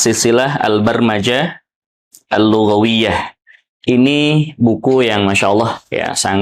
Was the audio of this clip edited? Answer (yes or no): no